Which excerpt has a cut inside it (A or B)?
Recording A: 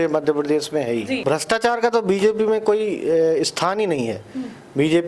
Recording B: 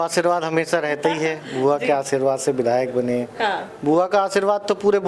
A